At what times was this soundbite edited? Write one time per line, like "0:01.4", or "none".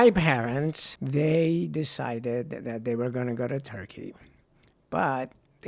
0:00.9